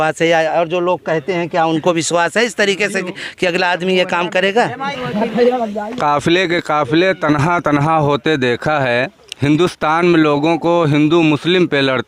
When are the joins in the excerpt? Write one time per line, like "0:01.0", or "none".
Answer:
0:04.9